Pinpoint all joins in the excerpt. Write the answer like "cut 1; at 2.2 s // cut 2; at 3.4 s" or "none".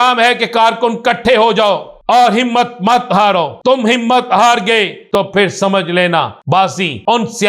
cut 1; at 1.9 s // cut 2; at 3.5 s // cut 3; at 5.0 s // cut 4; at 6.5 s